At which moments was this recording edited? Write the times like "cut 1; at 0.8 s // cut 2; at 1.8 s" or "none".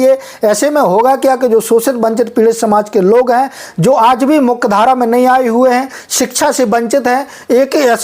none

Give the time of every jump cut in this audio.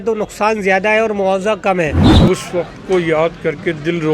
cut 1; at 2.1 s

